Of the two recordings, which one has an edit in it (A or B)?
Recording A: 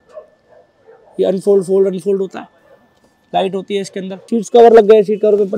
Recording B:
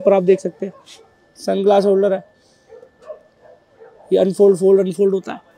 A